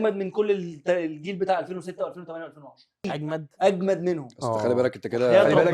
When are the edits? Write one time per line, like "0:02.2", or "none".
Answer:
0:03.0